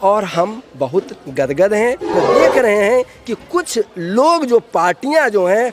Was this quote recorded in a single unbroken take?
no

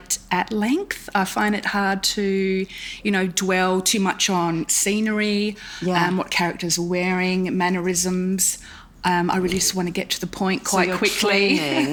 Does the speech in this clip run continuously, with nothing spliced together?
yes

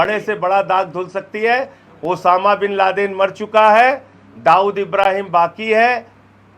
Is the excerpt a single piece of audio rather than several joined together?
yes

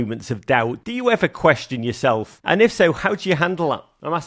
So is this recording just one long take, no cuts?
yes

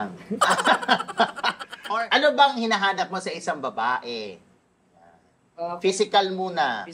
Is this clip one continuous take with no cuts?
no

